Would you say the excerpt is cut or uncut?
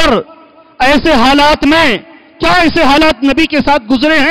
uncut